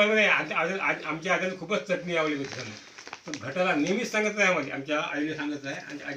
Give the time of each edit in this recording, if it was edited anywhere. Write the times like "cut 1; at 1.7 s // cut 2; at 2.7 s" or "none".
none